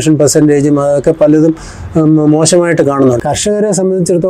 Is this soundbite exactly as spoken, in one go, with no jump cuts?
no; 1 cut; at 3.2 s

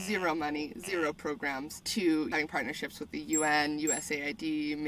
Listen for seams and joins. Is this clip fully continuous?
no; 2 cuts; at 1.8 s, 2.3 s

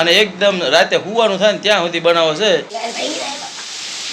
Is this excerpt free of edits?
no; 1 cut; at 2.7 s

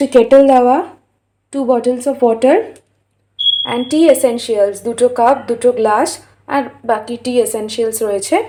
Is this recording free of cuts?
yes; 0 cuts

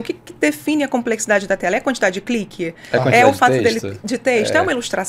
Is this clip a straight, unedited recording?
yes; 0 cuts

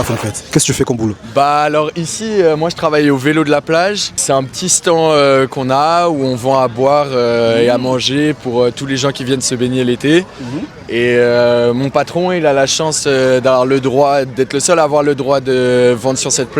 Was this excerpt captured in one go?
no; 1 cut; at 4.2 s

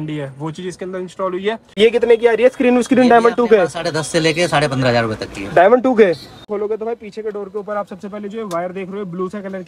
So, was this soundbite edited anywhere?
yes; 2 cuts; at 1.8 s, 6.4 s

